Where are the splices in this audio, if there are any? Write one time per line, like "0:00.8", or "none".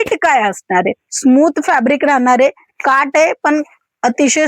0:01.0